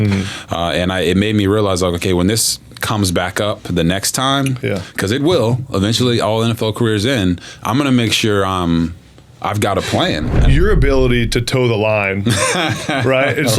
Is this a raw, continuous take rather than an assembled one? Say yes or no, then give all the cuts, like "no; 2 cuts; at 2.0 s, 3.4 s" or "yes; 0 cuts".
no; 1 cut; at 10.3 s